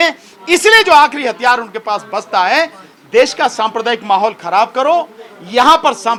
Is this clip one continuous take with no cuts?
yes; 0 cuts

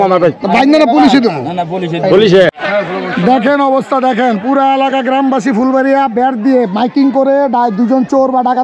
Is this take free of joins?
no; 1 cut; at 2.6 s

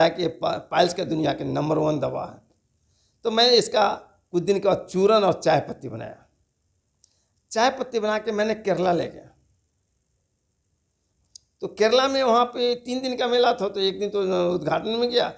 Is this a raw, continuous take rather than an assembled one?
yes; 0 cuts

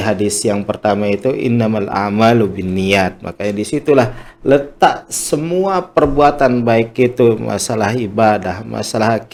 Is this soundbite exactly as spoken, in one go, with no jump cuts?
yes; 0 cuts

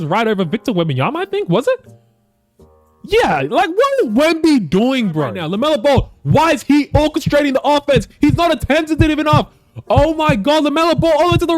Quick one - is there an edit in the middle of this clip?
yes; 1 cut; at 5.3 s

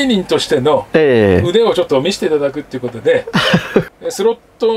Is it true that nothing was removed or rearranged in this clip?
no; 1 cut; at 3.8 s

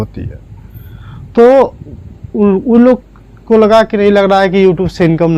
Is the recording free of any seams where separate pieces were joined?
yes; 0 cuts

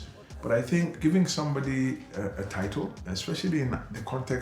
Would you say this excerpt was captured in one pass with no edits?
no; 2 cuts; at 0.9 s, 3.1 s

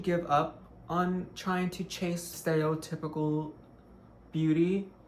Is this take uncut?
no; 1 cut; at 2.3 s

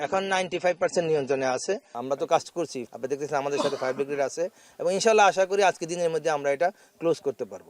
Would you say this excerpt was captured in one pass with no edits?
no; 2 cuts; at 1.9 s, 2.8 s

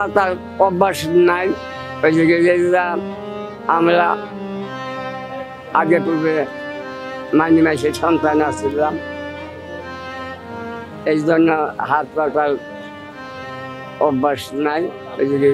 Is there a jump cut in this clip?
no; 0 cuts

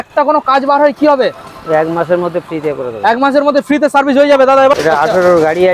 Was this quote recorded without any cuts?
no; 1 cut; at 4.8 s

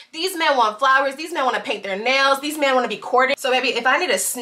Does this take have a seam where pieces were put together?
yes; 1 cut; at 3.3 s

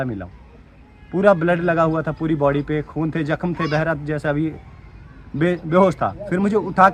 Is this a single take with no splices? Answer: yes; 0 cuts

